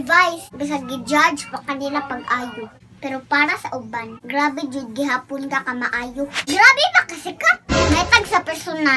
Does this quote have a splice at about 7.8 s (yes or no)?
no